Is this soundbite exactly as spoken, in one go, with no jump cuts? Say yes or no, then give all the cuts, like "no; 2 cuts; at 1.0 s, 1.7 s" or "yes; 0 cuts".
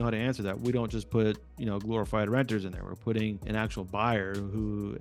no; 1 cut; at 3.4 s